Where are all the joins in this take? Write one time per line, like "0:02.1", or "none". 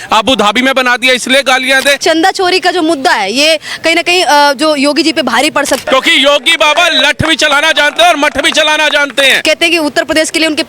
0:02.0
0:05.8
0:09.4